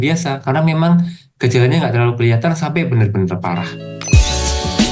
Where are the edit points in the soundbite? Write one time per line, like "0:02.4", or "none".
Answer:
0:03.9